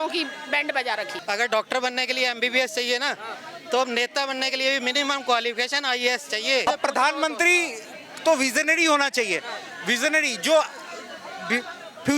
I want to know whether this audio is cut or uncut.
cut